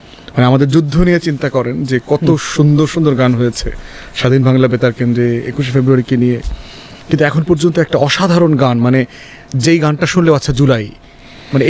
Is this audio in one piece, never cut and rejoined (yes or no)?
yes